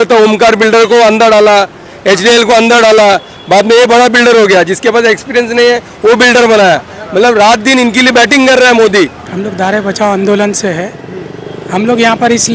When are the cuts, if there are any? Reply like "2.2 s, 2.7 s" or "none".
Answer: 9.3 s